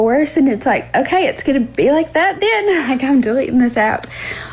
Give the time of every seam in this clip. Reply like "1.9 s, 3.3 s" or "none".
none

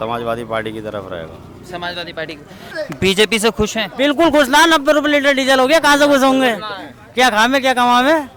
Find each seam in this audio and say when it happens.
2.8 s

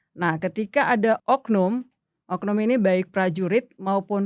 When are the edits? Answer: 1.2 s

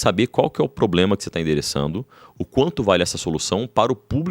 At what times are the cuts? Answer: none

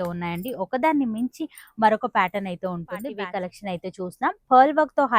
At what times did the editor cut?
3.2 s

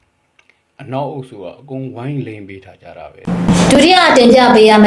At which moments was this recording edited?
3.1 s

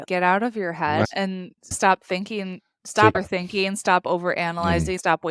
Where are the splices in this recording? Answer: 1.0 s, 3.2 s

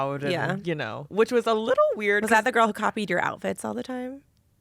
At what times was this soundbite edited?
1.0 s

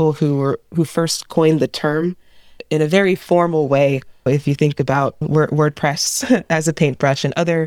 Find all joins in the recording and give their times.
2.6 s, 4.3 s

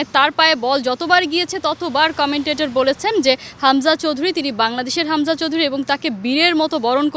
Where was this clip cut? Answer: none

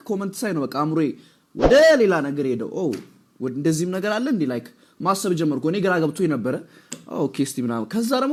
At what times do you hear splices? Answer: none

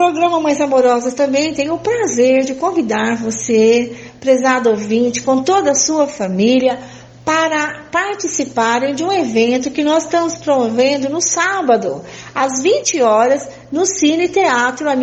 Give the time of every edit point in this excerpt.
none

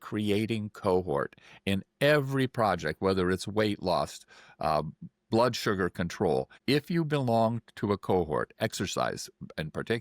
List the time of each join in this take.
6.5 s

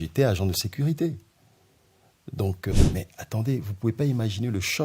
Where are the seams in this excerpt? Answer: 2.7 s

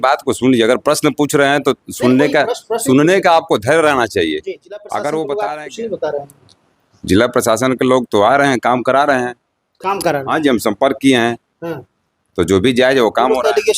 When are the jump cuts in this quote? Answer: 5.3 s

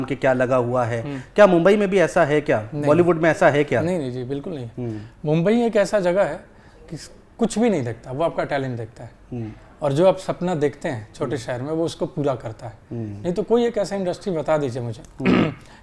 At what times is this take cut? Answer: none

